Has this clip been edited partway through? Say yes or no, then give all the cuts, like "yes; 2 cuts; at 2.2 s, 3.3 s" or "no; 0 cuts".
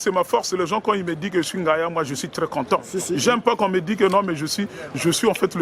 no; 0 cuts